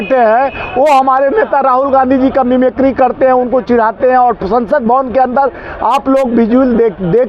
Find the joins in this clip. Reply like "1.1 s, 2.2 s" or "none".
none